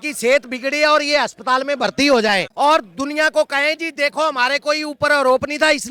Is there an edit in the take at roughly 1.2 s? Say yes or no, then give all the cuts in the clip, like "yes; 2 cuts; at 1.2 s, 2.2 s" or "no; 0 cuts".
no; 0 cuts